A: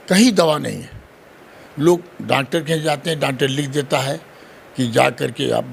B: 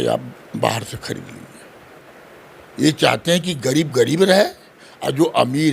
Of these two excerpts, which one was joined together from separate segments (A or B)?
B